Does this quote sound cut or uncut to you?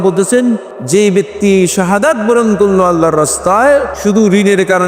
cut